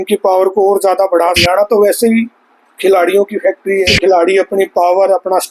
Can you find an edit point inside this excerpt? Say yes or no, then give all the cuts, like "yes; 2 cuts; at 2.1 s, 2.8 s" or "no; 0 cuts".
yes; 2 cuts; at 1.4 s, 3.9 s